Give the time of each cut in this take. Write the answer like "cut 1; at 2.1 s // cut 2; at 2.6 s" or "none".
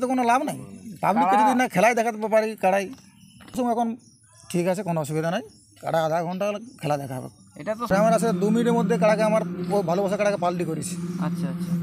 cut 1; at 3.6 s // cut 2; at 7.9 s